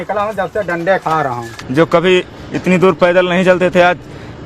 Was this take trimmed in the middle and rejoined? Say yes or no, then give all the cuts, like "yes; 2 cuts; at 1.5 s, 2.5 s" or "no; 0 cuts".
yes; 1 cut; at 1.5 s